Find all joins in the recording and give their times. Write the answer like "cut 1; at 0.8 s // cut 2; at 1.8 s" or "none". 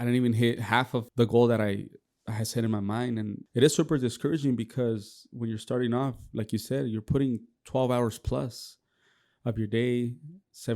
cut 1; at 1.1 s // cut 2; at 3.4 s